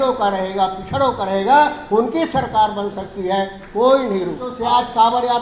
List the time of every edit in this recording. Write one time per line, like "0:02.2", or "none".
0:04.5